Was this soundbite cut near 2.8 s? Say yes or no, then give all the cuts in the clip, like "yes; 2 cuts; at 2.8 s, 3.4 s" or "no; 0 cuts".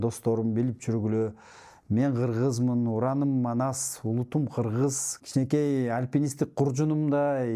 no; 1 cut; at 5.1 s